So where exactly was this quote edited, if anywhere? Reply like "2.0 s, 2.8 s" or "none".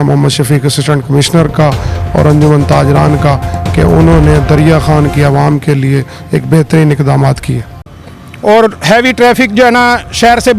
7.9 s